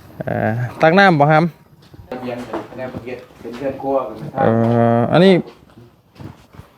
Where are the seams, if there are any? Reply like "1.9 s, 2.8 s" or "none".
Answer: 2.3 s